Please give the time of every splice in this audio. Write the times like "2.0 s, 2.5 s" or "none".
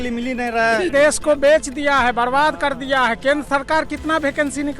0.9 s

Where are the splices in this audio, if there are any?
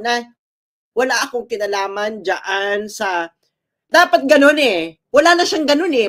none

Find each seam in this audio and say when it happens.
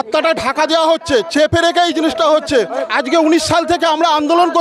2.7 s

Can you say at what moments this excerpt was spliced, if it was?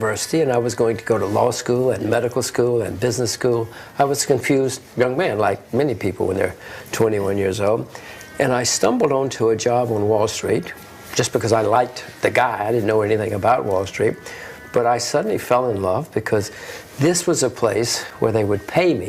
15.8 s

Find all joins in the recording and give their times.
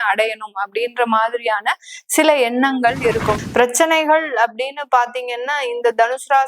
3.4 s

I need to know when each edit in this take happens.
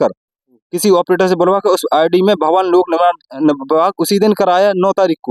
none

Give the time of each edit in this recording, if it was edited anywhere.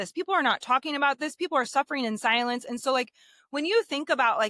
none

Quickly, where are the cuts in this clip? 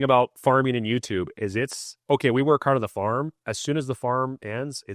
none

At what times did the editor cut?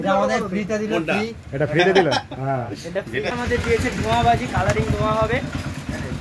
3.3 s

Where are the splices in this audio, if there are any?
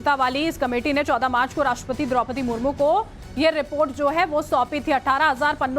2.4 s

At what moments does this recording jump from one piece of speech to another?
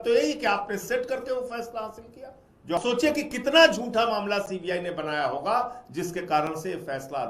2.8 s

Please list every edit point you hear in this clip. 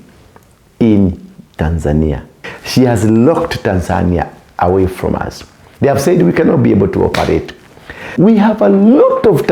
2.3 s, 8.1 s

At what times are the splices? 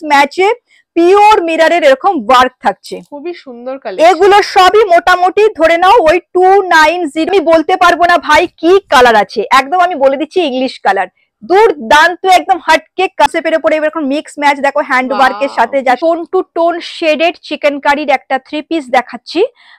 7.3 s, 13.3 s, 16.0 s

